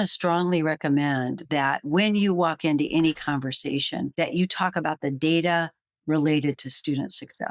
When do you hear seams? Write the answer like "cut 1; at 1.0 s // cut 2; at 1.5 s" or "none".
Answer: cut 1; at 4.1 s